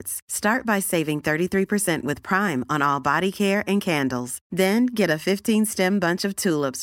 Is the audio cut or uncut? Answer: uncut